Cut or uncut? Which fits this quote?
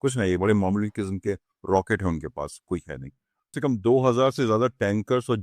cut